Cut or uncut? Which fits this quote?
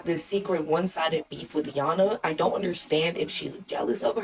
uncut